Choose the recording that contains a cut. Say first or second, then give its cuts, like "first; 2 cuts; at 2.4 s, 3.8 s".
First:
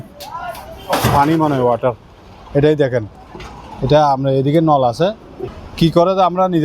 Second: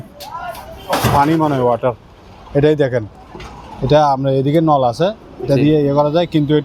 first; 1 cut; at 5.3 s